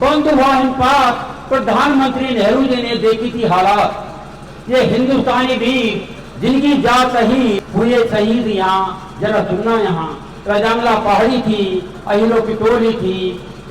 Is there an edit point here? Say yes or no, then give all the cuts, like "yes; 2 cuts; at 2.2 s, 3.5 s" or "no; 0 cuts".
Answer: yes; 1 cut; at 7.7 s